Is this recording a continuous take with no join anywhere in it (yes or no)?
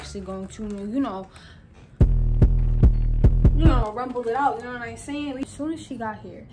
no